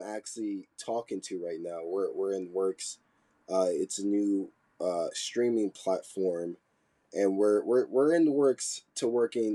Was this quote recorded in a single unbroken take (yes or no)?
yes